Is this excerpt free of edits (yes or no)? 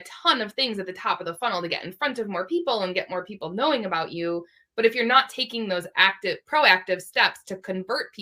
yes